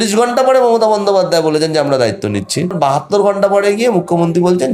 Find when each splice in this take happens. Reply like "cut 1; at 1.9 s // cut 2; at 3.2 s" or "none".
cut 1; at 2.8 s